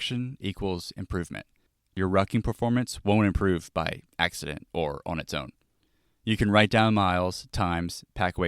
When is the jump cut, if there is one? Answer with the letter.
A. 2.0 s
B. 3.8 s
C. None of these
A